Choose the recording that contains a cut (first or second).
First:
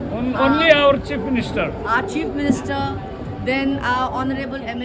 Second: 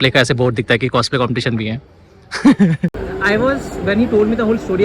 second